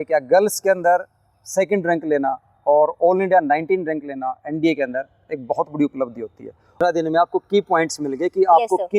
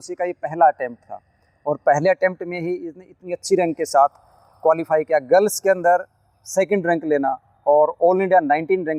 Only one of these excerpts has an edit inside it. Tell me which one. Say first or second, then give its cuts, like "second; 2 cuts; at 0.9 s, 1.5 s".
first; 1 cut; at 6.8 s